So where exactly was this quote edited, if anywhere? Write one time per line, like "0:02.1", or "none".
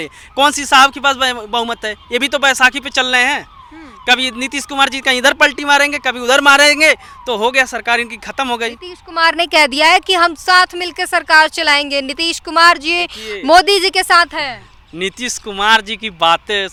none